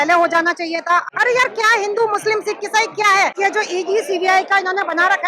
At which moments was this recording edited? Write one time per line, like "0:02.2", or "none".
0:01.1
0:03.4

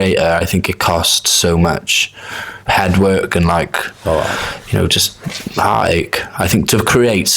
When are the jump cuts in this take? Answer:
none

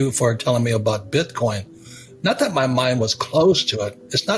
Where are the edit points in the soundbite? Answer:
none

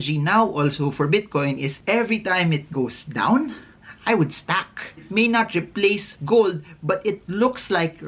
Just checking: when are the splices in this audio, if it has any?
0:05.0

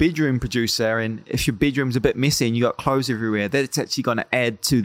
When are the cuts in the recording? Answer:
none

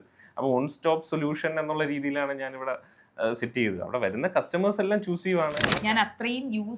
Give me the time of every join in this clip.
0:05.6

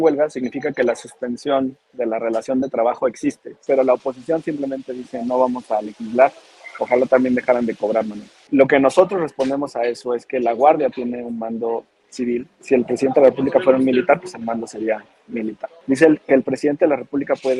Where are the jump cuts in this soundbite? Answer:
0:03.6
0:08.4
0:12.6
0:15.7

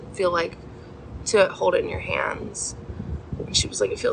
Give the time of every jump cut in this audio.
none

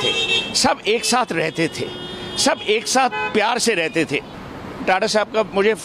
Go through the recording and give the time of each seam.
0:04.3

